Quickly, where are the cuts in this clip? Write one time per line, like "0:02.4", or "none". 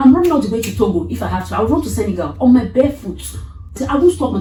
none